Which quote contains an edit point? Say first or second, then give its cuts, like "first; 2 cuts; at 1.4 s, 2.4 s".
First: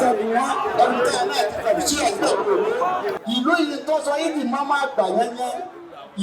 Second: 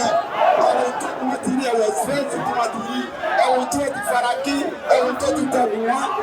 first; 1 cut; at 3.1 s